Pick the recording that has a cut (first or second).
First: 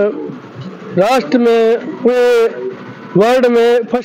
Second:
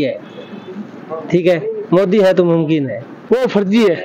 second